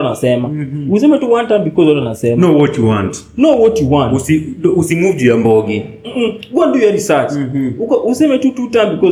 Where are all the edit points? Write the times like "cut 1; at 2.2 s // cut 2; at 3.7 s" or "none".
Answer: none